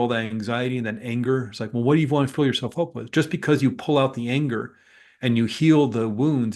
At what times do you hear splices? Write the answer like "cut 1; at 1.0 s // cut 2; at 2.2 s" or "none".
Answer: none